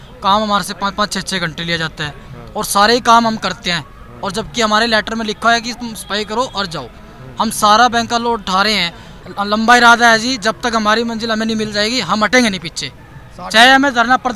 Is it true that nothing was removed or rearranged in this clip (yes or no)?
no